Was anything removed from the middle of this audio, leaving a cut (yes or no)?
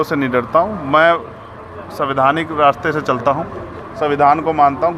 no